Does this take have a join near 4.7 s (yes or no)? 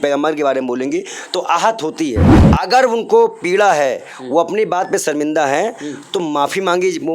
no